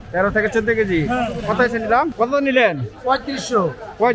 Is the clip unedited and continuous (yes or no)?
no